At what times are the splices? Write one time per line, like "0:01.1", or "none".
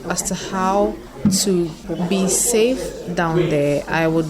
0:01.1
0:01.8